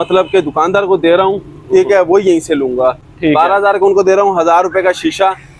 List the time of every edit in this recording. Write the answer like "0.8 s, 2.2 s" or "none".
none